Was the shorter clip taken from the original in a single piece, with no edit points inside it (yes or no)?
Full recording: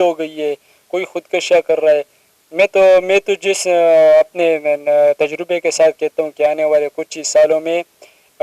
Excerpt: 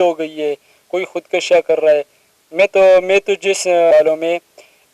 no